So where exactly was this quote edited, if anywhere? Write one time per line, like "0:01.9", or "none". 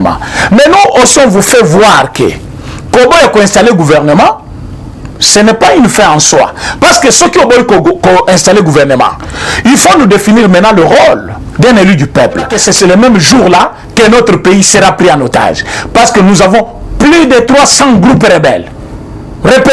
0:12.5